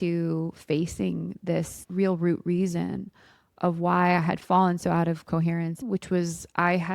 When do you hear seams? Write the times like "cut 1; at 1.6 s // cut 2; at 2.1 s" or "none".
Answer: cut 1; at 5.8 s

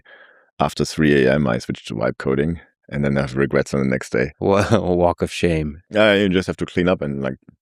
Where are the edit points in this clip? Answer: cut 1; at 4.3 s // cut 2; at 5.8 s

